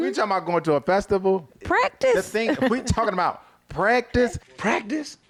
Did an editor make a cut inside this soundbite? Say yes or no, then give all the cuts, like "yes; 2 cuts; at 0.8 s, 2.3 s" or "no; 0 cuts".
no; 0 cuts